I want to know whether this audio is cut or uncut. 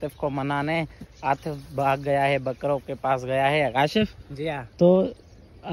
uncut